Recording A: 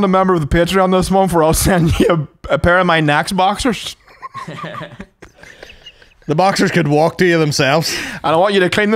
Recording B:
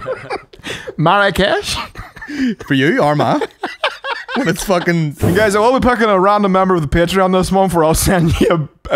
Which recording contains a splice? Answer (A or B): B